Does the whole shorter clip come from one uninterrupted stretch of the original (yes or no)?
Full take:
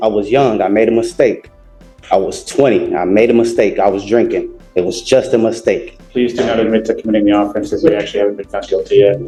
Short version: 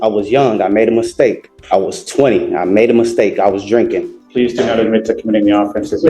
no